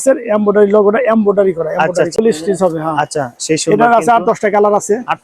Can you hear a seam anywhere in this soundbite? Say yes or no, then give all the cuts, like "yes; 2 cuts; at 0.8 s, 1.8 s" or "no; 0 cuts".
yes; 1 cut; at 2.2 s